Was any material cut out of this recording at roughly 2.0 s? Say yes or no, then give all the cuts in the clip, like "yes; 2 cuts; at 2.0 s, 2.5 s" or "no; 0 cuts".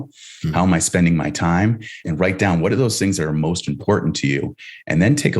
yes; 1 cut; at 2.0 s